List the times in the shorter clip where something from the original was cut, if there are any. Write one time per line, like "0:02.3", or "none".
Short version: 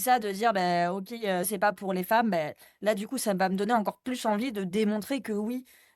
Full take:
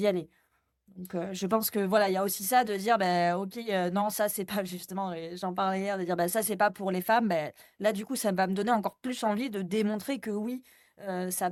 0:01.5